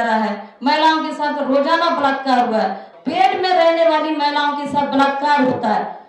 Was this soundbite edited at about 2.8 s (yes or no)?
yes